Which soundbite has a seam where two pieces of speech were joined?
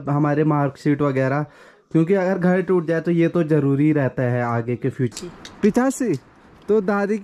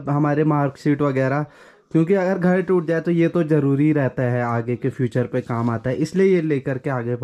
first; 1 cut; at 5.1 s

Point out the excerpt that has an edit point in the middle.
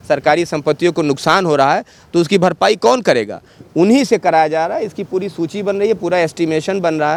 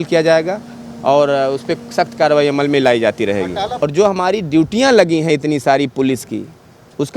second; 1 cut; at 3.7 s

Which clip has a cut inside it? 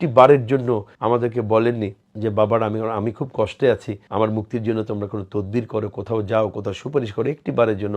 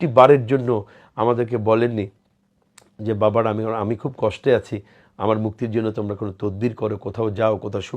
first; 3 cuts; at 0.9 s, 2.0 s, 4.0 s

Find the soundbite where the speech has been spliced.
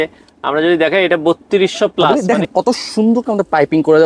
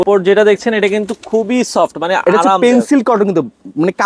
first; 1 cut; at 2.1 s

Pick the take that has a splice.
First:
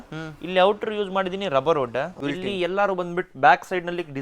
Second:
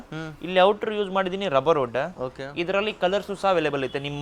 first; 1 cut; at 2.1 s

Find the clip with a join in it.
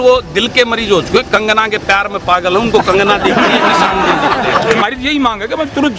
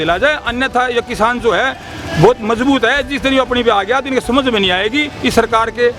first; 1 cut; at 4.8 s

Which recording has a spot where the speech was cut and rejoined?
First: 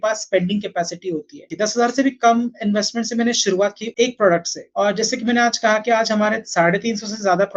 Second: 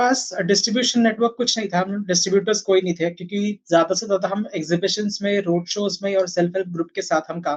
first; 3 cuts; at 1.5 s, 3.8 s, 4.6 s

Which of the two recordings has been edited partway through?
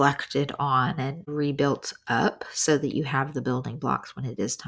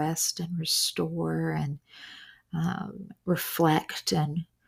first; 1 cut; at 1.2 s

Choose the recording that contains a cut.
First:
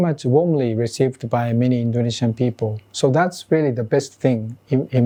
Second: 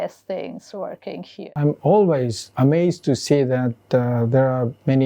second; 1 cut; at 1.5 s

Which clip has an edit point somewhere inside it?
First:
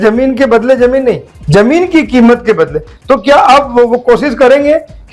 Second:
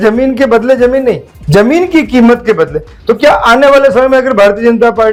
first; 1 cut; at 2.9 s

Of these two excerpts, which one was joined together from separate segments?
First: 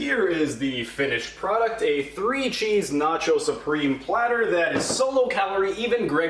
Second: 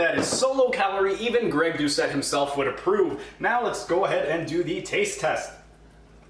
second; 1 cut; at 3.2 s

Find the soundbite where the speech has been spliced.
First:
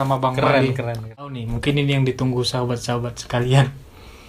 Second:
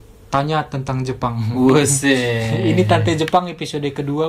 first; 1 cut; at 1.2 s

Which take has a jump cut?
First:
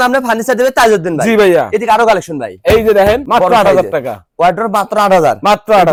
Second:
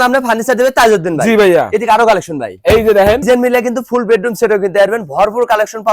second; 1 cut; at 3.2 s

